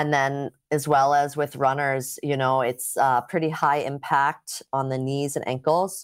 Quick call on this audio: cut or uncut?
uncut